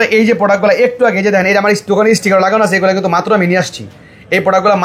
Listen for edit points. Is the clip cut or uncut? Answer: uncut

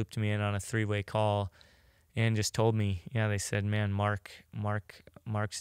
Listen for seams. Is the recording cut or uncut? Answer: uncut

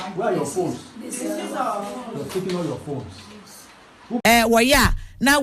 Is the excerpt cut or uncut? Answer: cut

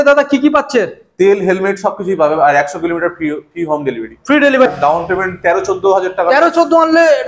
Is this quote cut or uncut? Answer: cut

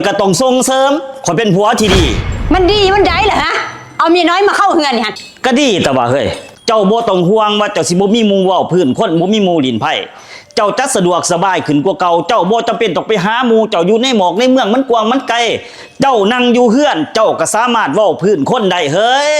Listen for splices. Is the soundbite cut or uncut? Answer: cut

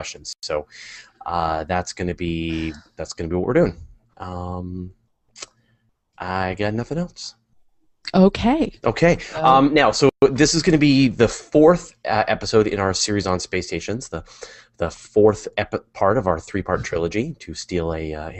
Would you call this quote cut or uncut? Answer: uncut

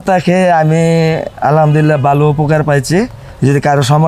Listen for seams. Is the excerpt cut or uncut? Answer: uncut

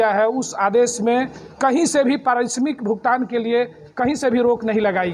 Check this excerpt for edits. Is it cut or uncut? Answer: uncut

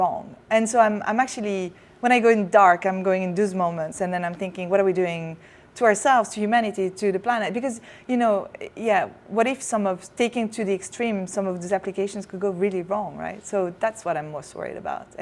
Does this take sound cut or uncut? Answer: uncut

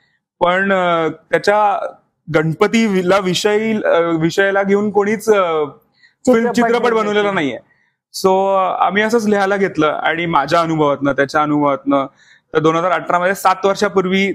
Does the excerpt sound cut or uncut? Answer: uncut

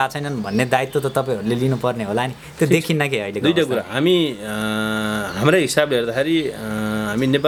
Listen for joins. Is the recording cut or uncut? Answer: uncut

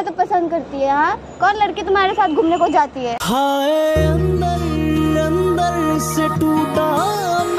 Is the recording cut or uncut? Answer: uncut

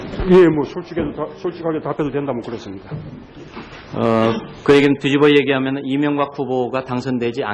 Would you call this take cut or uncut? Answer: uncut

